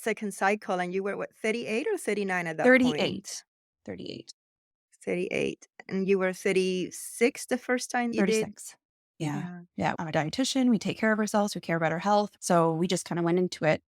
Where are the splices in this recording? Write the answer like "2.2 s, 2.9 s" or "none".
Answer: 8.1 s, 10.0 s, 12.3 s